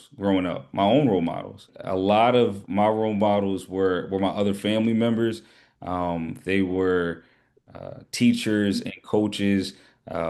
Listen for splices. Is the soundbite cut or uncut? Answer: cut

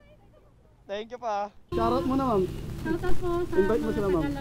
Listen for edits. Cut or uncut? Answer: cut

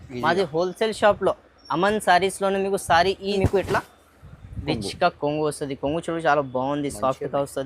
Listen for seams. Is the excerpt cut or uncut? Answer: cut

